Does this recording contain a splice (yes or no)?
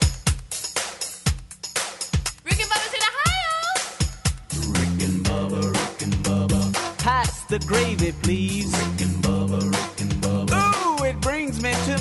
no